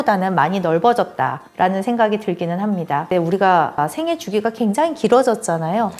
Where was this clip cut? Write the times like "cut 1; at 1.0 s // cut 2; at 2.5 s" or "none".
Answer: cut 1; at 3.1 s